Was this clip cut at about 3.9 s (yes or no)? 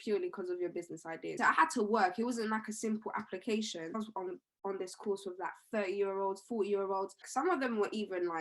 yes